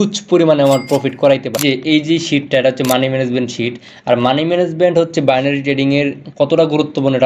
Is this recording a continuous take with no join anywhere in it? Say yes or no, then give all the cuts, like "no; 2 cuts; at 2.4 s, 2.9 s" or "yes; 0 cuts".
no; 1 cut; at 1.6 s